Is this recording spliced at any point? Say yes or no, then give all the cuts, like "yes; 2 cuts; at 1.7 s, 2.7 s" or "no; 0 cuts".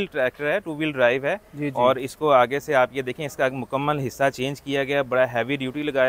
no; 0 cuts